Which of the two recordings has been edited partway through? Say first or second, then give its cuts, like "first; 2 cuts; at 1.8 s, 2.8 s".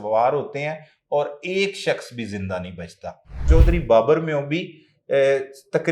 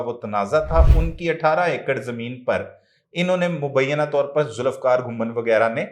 first; 1 cut; at 3.4 s